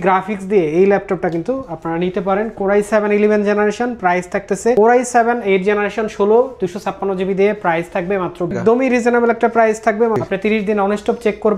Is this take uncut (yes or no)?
no